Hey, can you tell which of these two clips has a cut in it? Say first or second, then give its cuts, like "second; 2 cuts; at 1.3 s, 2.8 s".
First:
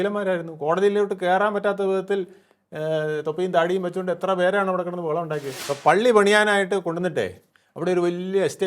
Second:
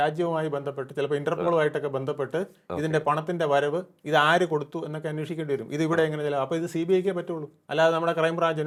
first; 1 cut; at 5.5 s